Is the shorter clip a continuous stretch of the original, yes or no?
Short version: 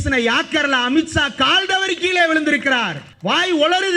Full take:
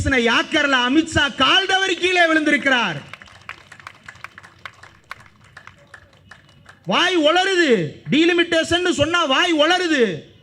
no